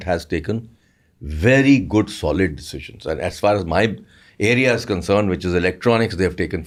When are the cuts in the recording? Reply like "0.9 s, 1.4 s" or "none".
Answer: none